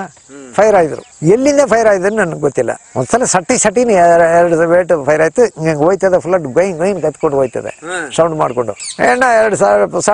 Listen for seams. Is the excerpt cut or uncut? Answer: cut